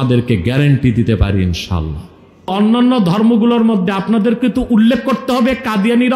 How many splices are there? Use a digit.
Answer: 1